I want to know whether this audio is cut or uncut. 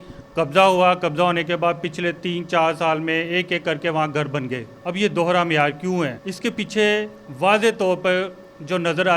cut